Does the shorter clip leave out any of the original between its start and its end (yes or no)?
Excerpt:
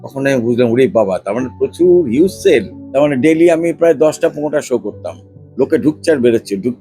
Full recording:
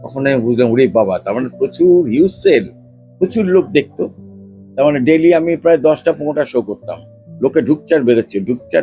yes